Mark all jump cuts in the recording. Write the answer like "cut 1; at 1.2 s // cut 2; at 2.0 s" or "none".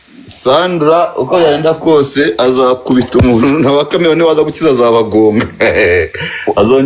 none